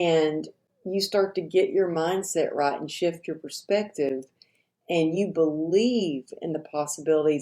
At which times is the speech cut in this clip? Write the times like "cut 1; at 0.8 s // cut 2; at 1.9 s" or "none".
none